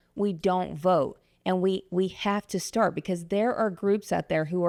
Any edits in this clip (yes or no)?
no